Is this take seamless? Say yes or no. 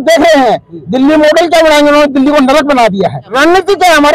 no